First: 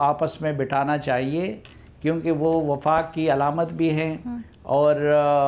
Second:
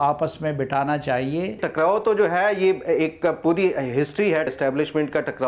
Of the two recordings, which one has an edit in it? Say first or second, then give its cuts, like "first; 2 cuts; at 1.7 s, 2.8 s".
second; 2 cuts; at 1.6 s, 4.5 s